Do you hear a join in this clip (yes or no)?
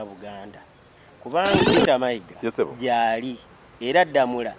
yes